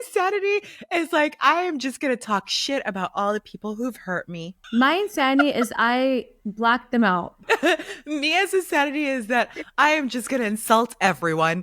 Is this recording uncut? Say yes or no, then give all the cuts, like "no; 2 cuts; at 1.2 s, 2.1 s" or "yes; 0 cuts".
no; 2 cuts; at 4.5 s, 7.4 s